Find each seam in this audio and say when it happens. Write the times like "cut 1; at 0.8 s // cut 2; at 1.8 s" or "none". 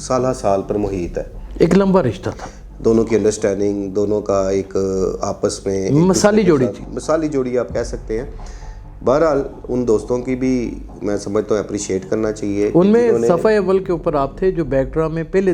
none